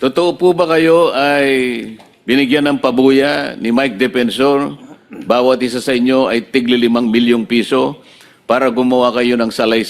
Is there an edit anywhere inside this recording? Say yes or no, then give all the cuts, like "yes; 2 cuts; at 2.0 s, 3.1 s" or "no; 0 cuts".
no; 0 cuts